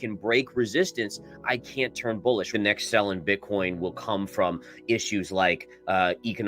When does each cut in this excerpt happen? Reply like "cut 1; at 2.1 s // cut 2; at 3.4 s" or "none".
cut 1; at 2.5 s